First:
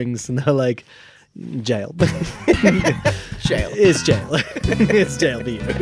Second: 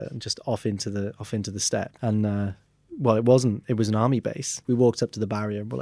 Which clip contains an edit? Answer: second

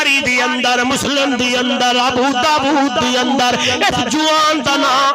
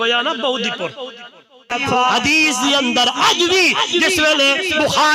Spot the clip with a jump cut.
second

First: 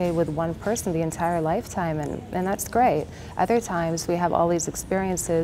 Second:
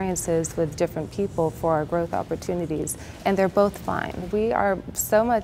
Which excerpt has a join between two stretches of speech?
second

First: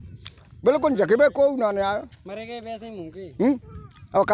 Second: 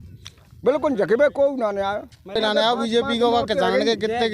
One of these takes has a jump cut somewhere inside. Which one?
second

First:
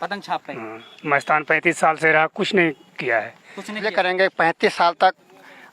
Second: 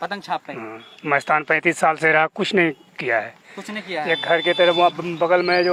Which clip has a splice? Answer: first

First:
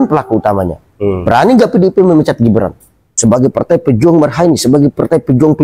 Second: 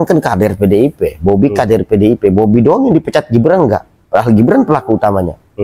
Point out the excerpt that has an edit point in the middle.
first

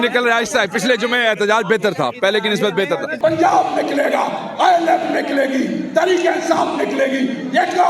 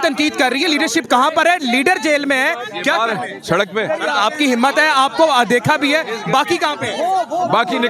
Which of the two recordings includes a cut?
first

